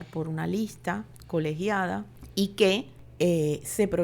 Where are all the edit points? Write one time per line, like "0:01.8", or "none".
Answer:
0:01.1
0:02.2
0:03.0